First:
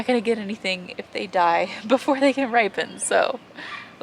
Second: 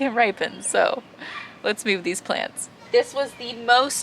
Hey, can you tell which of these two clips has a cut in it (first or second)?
second